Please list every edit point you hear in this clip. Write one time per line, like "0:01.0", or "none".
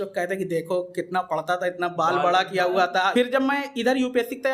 0:03.1